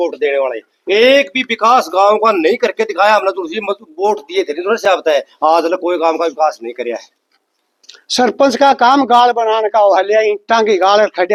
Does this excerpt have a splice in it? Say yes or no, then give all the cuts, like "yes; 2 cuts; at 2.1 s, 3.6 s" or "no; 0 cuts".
no; 0 cuts